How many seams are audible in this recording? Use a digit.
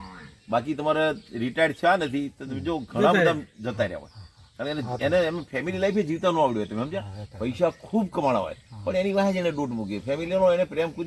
0